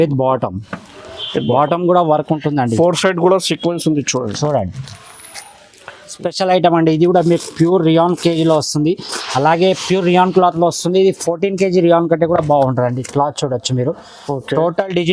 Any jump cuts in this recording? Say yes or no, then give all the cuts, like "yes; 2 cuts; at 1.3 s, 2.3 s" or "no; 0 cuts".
yes; 1 cut; at 6.1 s